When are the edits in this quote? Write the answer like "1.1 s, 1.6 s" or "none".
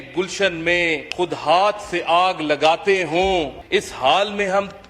1.1 s, 3.6 s